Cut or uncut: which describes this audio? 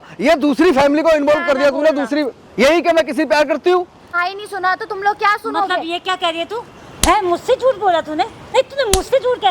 cut